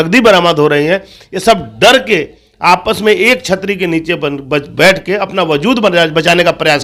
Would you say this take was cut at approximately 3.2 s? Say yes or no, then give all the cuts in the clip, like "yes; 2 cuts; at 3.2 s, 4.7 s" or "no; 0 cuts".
no; 0 cuts